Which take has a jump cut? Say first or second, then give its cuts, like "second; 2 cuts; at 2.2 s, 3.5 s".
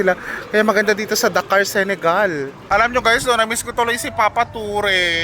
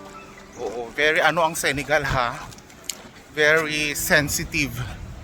first; 1 cut; at 2.6 s